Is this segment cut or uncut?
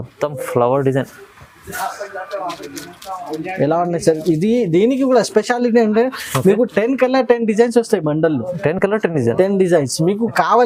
uncut